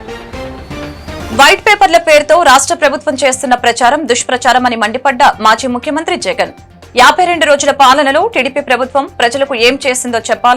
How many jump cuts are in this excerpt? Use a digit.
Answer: 0